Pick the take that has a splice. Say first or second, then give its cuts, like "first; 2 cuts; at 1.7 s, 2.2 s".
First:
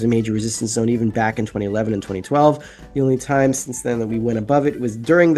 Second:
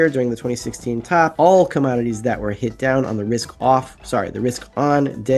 second; 1 cut; at 1.3 s